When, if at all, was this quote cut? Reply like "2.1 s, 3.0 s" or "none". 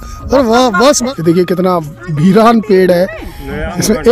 1.0 s, 2.0 s